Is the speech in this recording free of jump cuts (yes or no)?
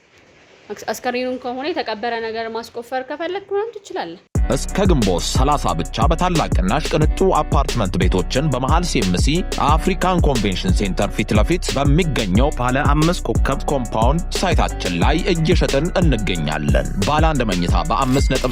no